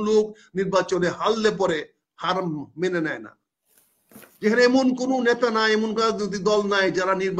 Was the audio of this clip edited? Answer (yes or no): no